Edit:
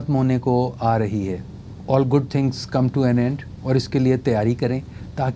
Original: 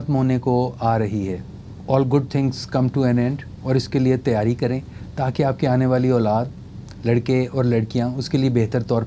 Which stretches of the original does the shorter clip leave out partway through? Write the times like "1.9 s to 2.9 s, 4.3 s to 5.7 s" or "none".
none